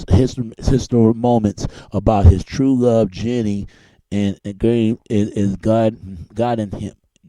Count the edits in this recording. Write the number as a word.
one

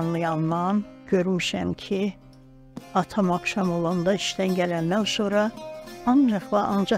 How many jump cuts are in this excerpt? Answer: one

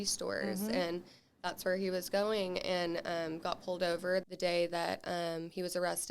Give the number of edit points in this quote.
one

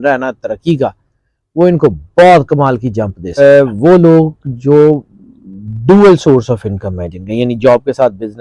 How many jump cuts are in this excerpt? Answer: one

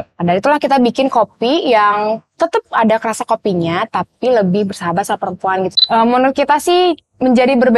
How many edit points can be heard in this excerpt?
one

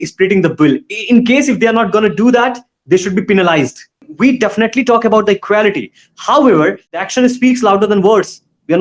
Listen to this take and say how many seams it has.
two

